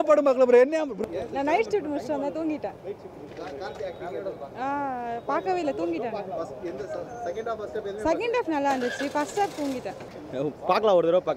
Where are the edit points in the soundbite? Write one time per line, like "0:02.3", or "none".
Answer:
none